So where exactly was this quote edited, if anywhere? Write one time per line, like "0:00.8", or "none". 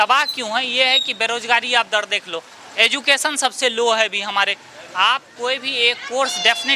none